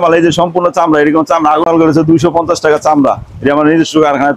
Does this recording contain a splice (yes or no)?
yes